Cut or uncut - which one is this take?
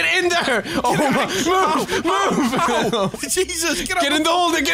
uncut